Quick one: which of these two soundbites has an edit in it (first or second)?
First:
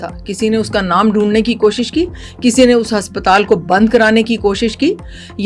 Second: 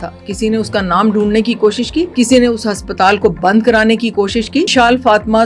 second